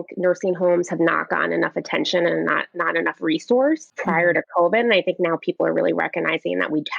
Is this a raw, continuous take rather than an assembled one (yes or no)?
no